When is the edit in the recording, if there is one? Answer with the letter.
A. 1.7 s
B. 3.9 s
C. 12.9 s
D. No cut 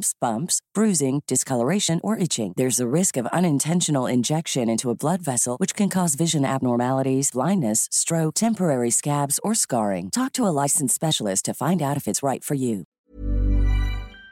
C